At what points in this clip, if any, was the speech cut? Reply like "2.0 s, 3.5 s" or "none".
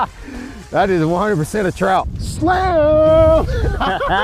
2.2 s